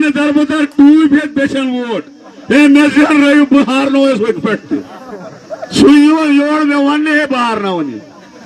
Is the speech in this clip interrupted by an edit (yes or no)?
no